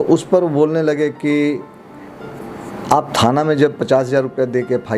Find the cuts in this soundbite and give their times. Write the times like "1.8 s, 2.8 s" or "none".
none